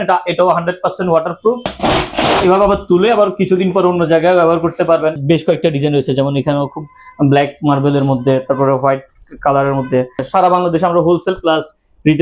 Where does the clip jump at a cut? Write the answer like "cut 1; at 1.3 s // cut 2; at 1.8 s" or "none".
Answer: cut 1; at 1.7 s // cut 2; at 5.2 s // cut 3; at 10.3 s